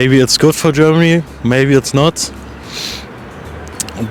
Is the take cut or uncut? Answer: uncut